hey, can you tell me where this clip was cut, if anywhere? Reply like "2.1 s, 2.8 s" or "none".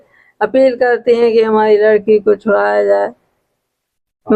none